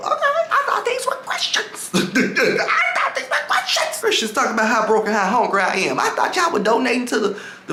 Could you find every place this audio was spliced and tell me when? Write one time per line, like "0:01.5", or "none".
none